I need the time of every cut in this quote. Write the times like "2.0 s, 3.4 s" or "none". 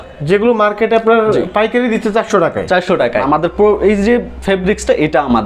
3.2 s